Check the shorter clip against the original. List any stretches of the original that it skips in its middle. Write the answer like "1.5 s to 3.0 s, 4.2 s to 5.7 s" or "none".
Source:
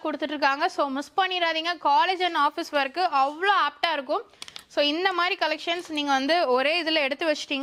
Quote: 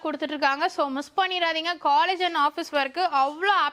none